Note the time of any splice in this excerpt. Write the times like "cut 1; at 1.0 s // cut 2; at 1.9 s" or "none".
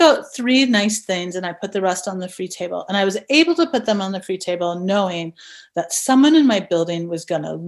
none